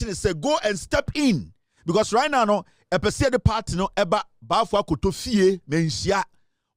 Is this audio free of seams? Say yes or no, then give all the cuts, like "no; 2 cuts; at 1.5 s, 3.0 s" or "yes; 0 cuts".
yes; 0 cuts